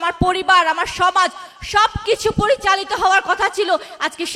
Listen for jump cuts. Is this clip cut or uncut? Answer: uncut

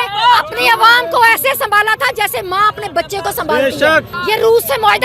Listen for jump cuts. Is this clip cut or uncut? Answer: cut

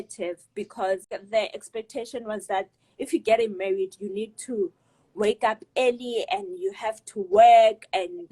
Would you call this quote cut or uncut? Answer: cut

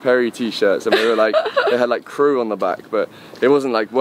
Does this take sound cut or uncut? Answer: uncut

